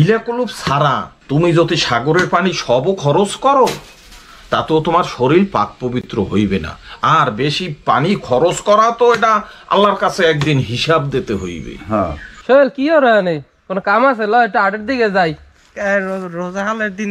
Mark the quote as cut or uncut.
cut